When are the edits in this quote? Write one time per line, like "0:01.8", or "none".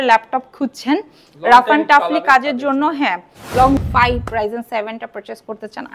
0:03.8